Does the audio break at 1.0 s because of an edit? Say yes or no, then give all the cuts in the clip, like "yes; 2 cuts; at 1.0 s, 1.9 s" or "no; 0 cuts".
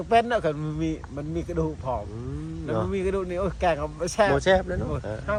no; 0 cuts